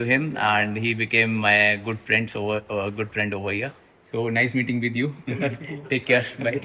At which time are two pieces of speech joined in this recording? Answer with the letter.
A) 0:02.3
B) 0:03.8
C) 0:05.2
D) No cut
D